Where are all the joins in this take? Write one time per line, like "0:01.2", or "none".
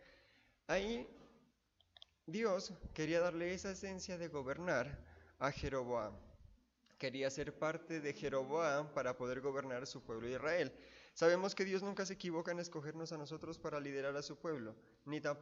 none